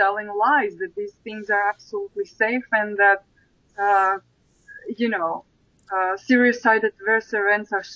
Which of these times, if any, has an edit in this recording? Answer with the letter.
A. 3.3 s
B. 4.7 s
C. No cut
C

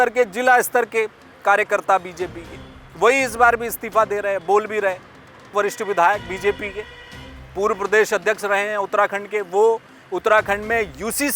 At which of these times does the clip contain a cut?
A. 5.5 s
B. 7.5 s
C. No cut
A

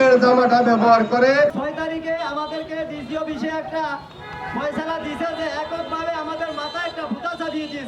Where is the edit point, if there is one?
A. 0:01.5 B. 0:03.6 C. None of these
A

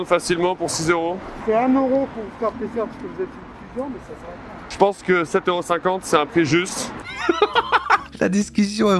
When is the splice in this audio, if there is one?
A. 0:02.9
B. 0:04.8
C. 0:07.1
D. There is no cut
C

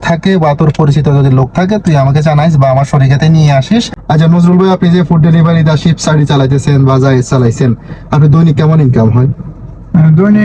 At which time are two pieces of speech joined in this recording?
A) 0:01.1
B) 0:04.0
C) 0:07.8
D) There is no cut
B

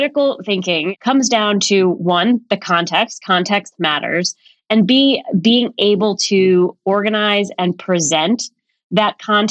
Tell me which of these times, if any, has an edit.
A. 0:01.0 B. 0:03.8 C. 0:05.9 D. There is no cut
A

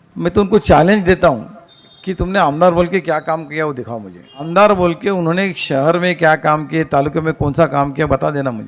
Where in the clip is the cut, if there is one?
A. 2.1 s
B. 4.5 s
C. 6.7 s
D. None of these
B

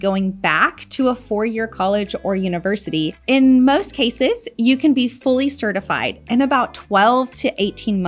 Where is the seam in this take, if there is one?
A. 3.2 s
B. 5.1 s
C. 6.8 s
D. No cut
A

